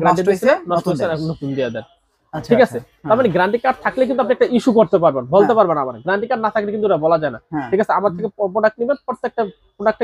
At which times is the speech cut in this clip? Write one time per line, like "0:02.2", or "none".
none